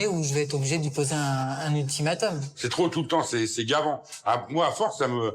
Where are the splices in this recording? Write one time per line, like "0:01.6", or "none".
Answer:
0:02.5